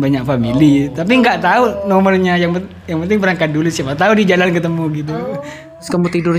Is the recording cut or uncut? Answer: cut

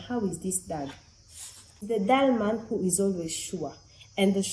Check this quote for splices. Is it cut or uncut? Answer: cut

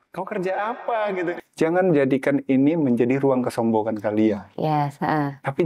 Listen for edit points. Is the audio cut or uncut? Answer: cut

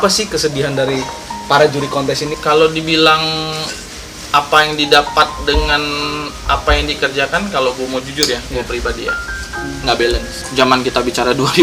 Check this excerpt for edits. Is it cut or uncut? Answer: cut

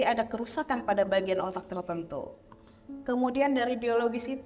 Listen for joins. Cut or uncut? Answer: uncut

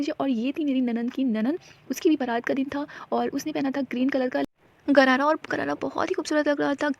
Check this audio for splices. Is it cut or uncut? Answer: uncut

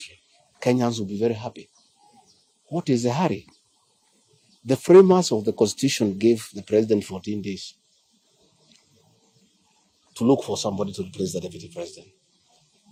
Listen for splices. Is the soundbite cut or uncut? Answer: uncut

